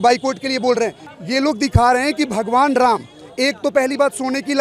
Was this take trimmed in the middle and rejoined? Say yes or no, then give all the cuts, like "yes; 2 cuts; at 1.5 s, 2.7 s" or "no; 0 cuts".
no; 0 cuts